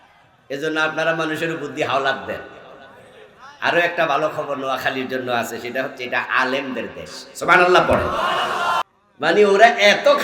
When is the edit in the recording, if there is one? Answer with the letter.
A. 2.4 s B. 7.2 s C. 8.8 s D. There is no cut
C